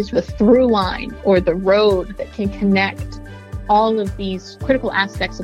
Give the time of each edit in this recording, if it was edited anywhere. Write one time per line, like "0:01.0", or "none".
none